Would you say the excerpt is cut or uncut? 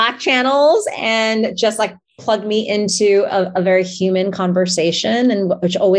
uncut